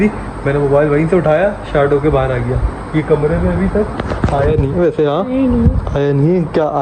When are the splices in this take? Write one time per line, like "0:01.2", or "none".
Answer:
0:02.7